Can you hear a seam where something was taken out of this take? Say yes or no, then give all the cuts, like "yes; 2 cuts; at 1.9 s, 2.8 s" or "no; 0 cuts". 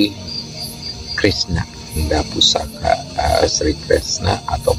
yes; 1 cut; at 2.0 s